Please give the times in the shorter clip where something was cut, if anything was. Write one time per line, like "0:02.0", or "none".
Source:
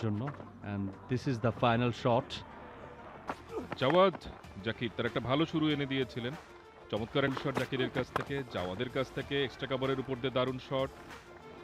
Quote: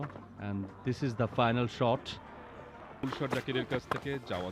0:03.0